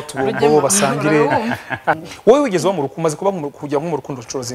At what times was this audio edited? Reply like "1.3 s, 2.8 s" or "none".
2.1 s